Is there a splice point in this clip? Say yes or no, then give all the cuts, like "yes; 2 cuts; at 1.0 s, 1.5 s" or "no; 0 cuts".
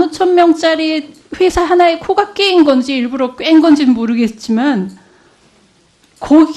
yes; 1 cut; at 3.8 s